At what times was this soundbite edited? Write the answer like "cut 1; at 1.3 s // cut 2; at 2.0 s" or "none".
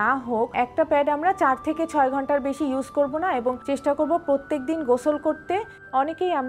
none